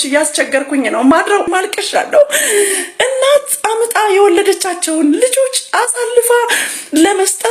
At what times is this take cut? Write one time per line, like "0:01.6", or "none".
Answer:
0:01.5